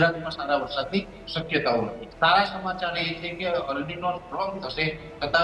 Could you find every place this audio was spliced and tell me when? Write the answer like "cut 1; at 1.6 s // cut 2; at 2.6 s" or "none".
cut 1; at 2.0 s